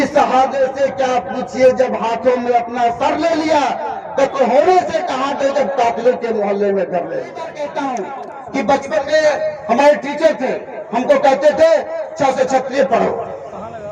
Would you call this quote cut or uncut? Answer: cut